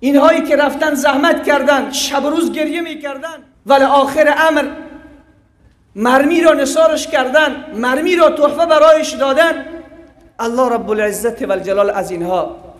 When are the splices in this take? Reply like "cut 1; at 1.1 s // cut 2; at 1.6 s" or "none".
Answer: cut 1; at 3.0 s